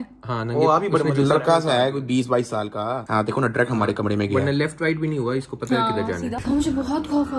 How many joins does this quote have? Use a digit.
1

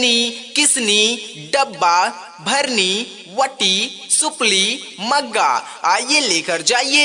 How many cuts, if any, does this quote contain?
1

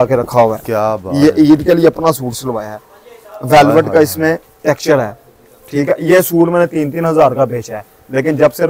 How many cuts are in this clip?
0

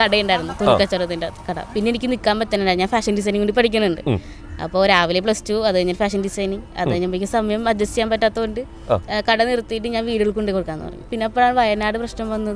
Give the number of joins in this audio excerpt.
2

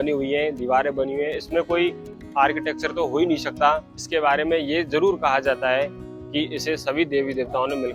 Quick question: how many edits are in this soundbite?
1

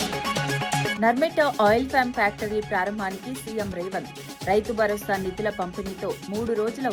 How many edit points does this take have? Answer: 1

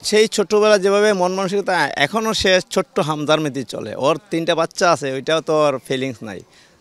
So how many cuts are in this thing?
0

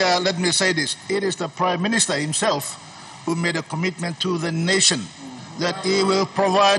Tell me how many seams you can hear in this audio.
0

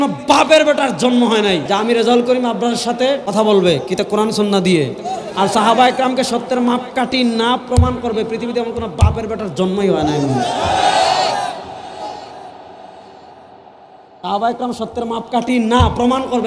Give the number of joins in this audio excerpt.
2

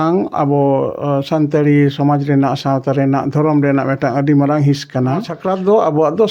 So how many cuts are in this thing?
1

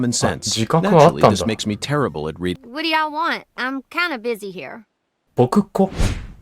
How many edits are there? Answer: 1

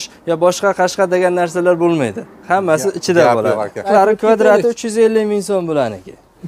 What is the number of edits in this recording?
1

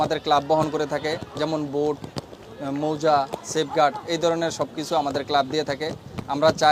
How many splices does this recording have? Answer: 0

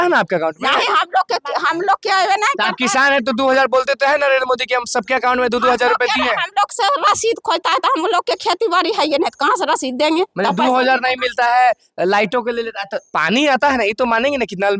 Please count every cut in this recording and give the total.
0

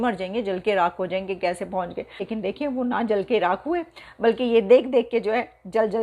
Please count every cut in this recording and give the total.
1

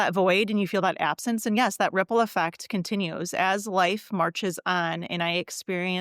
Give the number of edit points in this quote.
0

